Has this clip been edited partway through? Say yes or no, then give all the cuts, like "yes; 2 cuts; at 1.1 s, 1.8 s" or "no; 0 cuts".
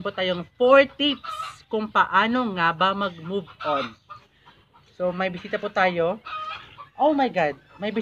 yes; 1 cut; at 4.1 s